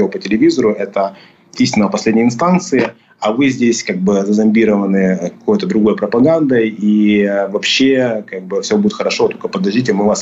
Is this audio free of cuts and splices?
yes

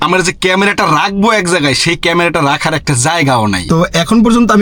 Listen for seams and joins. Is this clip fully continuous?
no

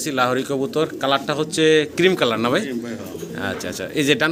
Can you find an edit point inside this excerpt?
no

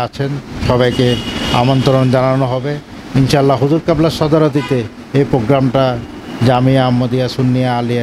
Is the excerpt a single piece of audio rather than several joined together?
yes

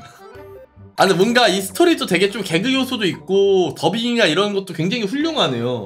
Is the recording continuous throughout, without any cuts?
yes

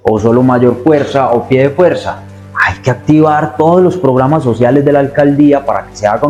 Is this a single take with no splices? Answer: yes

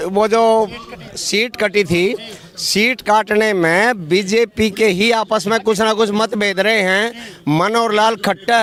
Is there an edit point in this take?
no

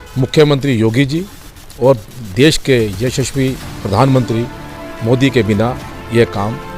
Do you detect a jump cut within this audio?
no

